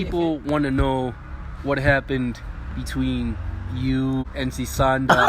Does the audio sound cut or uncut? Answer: cut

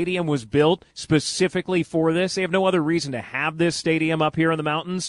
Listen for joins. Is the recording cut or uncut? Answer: cut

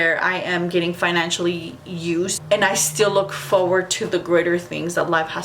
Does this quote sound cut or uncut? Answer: cut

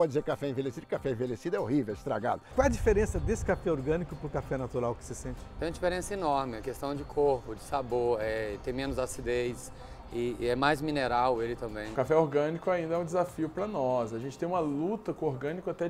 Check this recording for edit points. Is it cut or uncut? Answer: cut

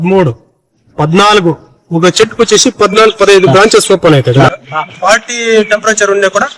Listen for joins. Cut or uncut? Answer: cut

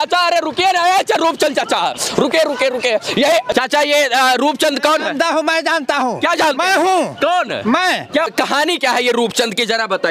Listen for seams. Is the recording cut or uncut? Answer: cut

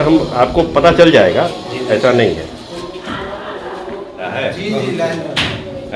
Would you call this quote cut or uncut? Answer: cut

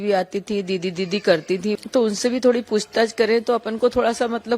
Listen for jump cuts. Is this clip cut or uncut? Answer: cut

